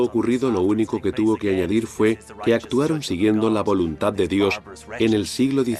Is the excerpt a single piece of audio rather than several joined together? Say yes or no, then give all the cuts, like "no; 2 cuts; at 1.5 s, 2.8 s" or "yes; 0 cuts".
yes; 0 cuts